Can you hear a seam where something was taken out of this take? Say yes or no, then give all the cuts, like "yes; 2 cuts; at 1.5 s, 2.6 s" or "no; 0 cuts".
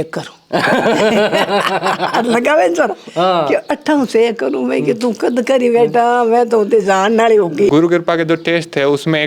yes; 1 cut; at 7.7 s